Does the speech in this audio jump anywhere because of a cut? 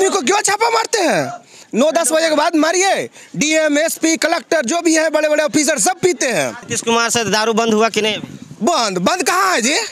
yes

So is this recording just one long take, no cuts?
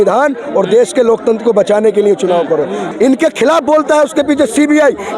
no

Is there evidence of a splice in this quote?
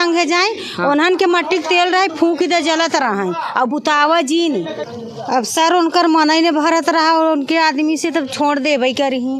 yes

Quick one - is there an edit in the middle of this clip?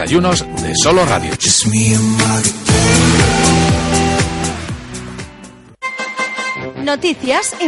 yes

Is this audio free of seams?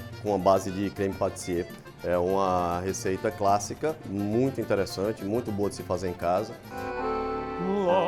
no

